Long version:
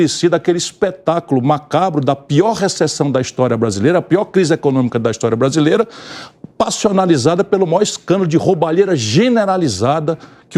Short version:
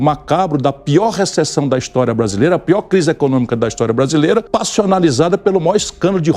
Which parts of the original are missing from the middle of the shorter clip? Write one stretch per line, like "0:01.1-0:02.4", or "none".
0:05.9-0:06.5

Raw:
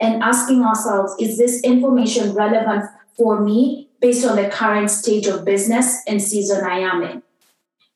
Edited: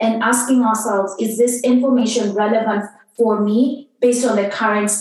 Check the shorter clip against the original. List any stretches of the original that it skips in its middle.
none

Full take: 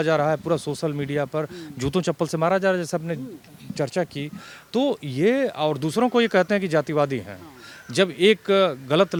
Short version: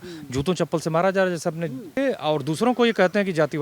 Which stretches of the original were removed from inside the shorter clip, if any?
0:03.4-0:05.3

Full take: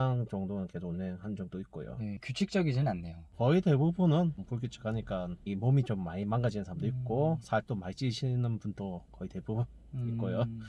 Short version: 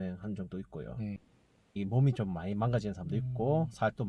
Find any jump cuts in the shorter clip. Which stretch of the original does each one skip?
0:02.3-0:05.0

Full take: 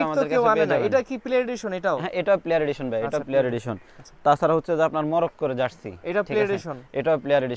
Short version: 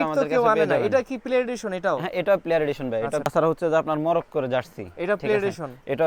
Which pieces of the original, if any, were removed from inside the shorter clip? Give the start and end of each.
0:03.3-0:04.4

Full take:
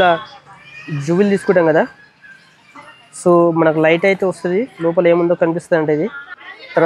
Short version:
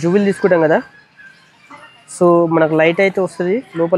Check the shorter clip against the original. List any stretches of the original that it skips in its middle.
none

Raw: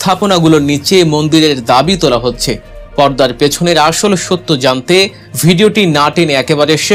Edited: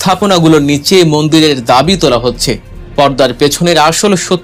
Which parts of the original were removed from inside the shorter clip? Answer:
none

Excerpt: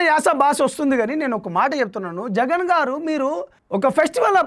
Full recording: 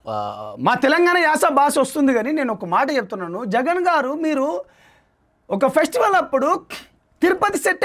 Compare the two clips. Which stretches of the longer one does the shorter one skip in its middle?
0:04.7-0:05.3

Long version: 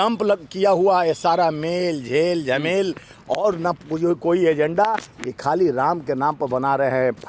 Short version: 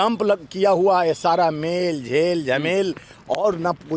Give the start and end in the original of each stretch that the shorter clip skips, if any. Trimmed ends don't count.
none

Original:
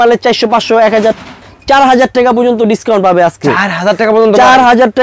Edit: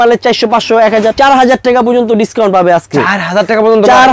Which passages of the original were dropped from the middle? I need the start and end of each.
0:01.1-0:01.6

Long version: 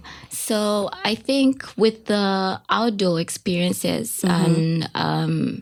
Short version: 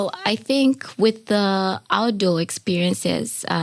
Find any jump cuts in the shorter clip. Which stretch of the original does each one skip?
none

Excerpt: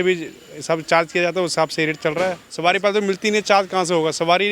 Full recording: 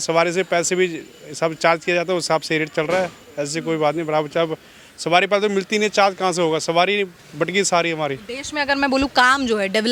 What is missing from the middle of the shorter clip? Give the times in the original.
0:03.2-0:04.9

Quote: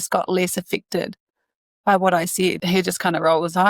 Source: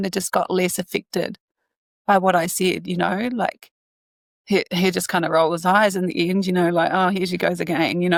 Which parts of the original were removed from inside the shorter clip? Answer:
0:02.8-0:04.7

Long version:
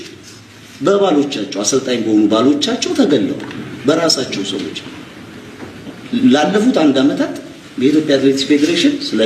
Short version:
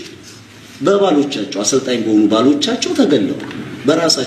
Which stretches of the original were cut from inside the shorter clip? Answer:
none

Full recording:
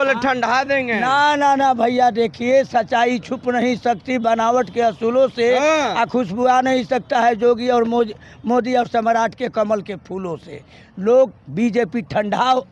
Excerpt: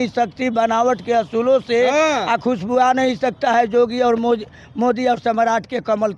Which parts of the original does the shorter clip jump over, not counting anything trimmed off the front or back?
none

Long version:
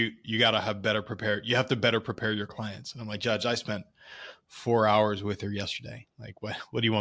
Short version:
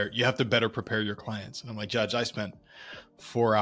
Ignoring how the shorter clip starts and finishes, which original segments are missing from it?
none

